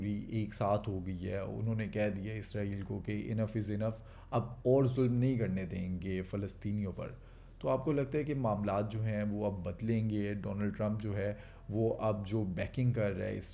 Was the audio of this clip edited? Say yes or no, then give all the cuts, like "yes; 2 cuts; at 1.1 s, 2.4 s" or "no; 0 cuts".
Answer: no; 0 cuts